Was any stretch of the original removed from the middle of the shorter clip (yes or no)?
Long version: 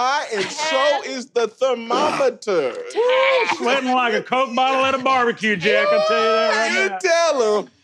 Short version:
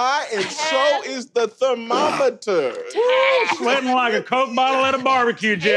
no